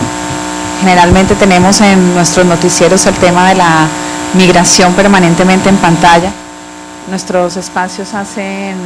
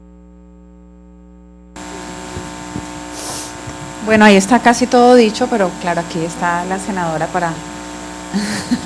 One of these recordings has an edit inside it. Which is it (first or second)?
second